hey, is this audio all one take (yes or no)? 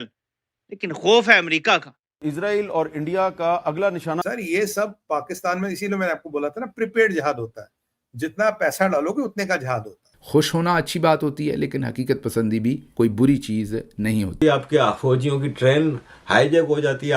no